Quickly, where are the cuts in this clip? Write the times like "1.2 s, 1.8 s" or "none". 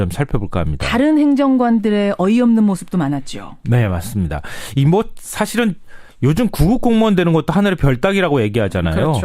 5.2 s